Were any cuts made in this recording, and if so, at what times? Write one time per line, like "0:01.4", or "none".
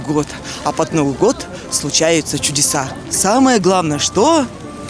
none

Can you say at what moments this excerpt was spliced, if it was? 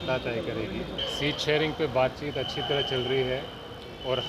0:00.9

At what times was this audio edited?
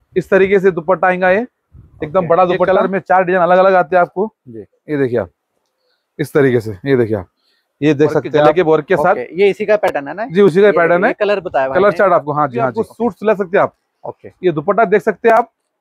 0:02.7
0:08.5
0:12.8

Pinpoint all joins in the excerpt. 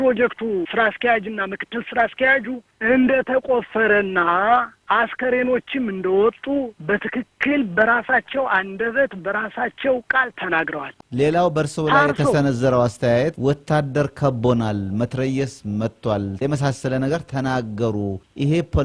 0:10.9

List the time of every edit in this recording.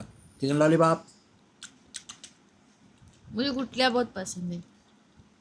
0:00.9

